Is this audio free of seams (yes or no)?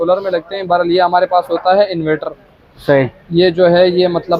yes